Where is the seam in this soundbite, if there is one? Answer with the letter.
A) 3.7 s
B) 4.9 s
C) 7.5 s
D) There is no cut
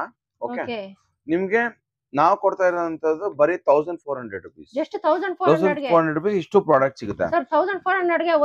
D